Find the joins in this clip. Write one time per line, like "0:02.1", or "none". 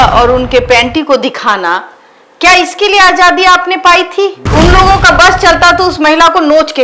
0:04.4